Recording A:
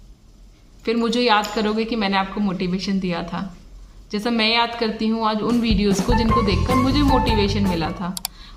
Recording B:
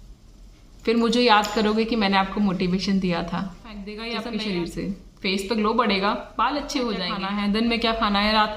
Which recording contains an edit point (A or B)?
B